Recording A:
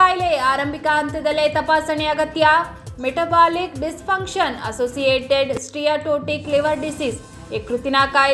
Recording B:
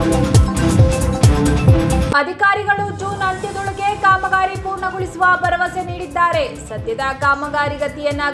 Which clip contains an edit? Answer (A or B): B